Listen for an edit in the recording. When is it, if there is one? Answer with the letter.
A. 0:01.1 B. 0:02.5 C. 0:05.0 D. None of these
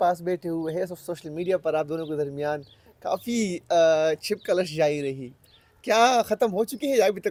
D